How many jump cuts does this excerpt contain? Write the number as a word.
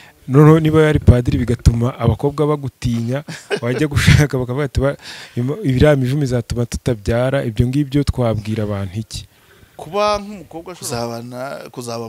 one